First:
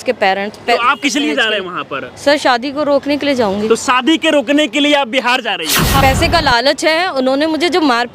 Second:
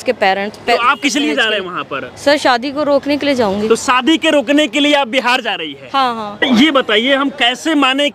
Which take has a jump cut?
first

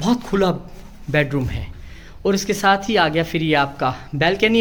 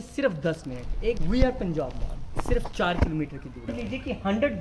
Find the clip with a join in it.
second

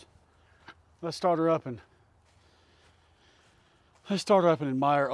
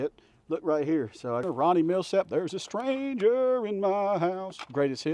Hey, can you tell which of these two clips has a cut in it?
second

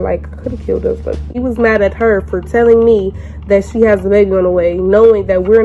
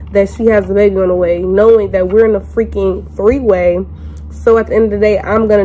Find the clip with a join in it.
first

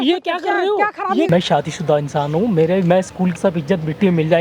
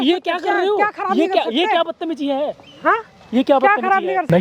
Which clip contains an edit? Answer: first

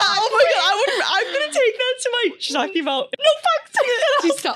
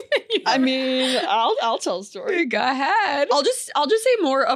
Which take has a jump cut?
first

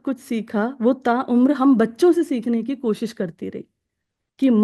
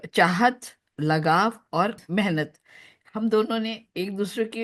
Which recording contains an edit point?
second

